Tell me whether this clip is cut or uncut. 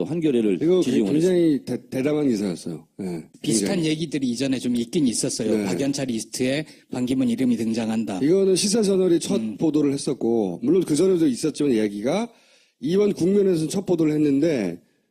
cut